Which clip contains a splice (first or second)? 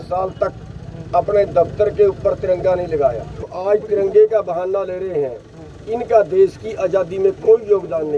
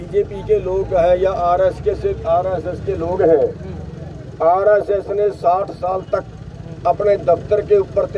first